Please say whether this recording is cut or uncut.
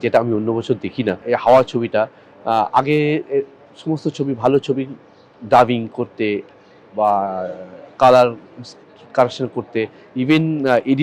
cut